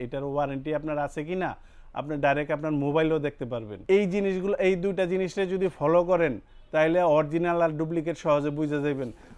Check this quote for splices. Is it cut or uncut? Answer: uncut